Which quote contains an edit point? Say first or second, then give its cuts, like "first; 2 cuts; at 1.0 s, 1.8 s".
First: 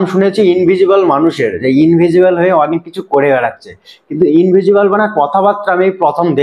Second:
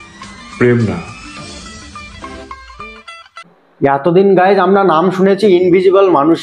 second; 1 cut; at 3.6 s